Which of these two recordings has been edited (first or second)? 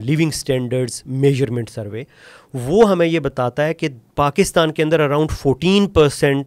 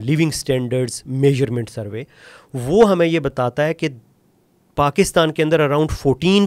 first